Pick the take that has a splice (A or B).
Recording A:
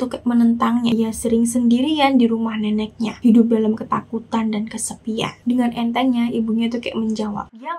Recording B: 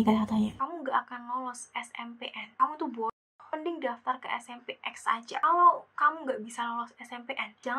A